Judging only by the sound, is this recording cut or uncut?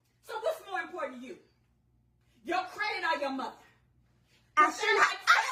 uncut